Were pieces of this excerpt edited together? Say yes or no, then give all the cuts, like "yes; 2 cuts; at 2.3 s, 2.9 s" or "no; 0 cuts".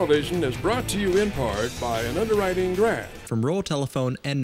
yes; 1 cut; at 3.1 s